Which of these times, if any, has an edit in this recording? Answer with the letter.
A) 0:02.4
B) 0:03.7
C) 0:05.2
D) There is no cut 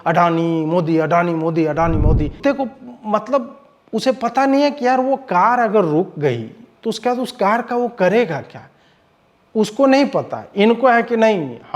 A